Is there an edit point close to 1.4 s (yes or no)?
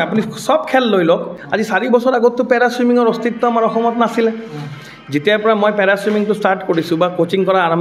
yes